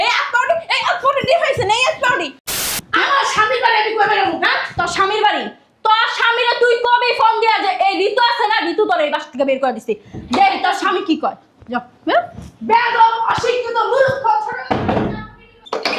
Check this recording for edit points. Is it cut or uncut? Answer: cut